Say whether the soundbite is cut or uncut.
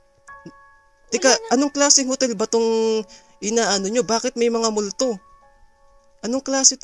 uncut